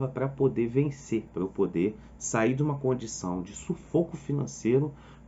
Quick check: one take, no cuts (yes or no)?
no